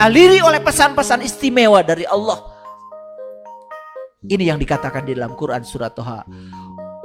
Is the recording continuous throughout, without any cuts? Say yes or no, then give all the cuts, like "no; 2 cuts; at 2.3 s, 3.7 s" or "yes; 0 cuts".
no; 1 cut; at 6.2 s